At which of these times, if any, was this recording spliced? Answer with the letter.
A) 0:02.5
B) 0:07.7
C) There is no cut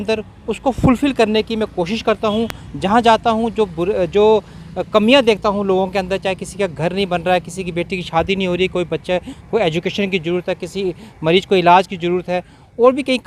C